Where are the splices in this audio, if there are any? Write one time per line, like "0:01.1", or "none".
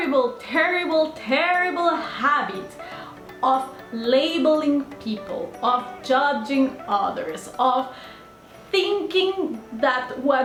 none